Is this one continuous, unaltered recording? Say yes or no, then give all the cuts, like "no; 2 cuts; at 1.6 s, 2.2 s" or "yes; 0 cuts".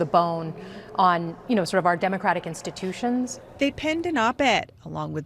no; 1 cut; at 3.4 s